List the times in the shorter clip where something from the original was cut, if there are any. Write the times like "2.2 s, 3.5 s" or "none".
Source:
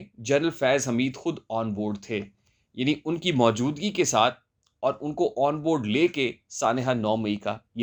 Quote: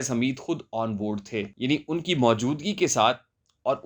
1.5 s

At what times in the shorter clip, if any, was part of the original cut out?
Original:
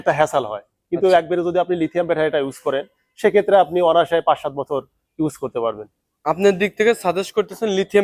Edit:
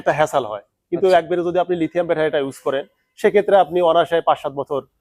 none

